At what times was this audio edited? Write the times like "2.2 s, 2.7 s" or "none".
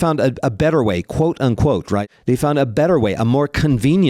2.0 s